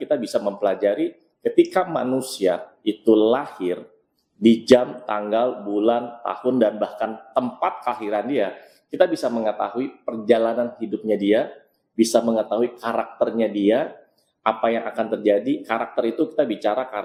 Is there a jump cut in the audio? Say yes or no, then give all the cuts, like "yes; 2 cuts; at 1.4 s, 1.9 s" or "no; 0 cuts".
no; 0 cuts